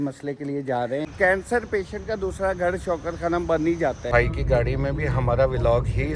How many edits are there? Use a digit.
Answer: 2